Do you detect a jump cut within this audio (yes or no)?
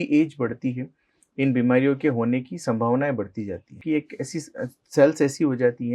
yes